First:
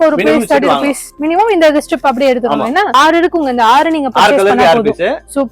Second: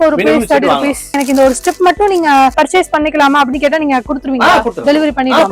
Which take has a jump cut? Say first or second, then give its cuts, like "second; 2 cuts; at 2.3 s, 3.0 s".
second; 1 cut; at 1.1 s